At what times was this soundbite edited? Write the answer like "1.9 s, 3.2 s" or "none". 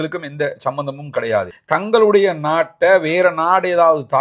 1.5 s